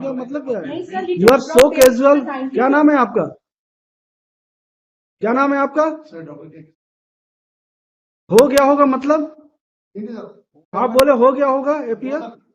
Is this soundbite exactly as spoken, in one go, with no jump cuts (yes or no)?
no